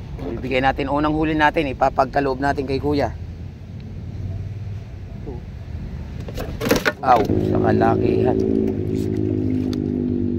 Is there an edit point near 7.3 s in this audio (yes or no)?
yes